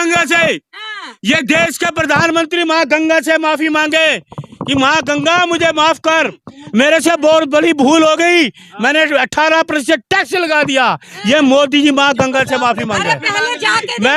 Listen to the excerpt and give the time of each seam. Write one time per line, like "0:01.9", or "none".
none